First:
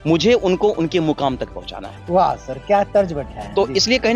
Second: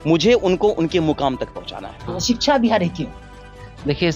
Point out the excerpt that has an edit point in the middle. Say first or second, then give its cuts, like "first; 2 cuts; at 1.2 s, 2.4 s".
second; 1 cut; at 2.0 s